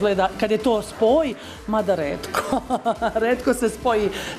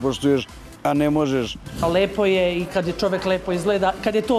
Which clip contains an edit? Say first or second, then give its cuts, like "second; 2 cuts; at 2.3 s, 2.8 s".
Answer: second; 1 cut; at 1.8 s